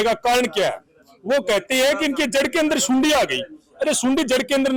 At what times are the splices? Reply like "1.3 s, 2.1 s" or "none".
none